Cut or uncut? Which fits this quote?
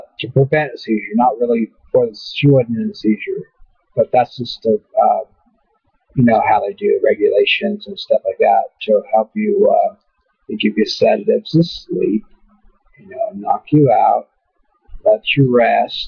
cut